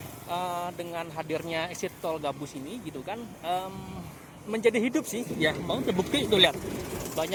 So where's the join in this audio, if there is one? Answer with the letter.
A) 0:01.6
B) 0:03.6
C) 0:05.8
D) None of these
D